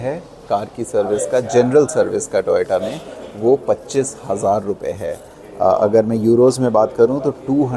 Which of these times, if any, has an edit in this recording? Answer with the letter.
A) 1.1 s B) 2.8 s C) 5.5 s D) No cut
D